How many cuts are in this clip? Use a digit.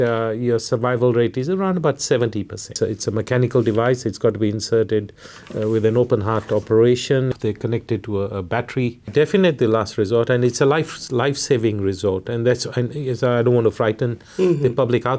3